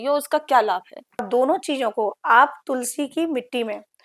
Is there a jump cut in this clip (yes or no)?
yes